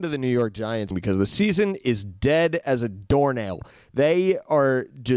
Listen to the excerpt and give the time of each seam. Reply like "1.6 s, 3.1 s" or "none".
0.9 s